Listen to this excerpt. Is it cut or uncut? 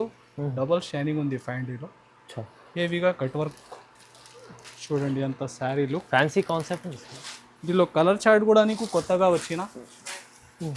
uncut